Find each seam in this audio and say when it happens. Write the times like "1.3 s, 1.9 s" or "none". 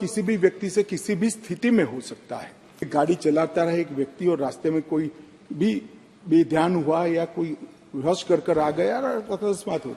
2.9 s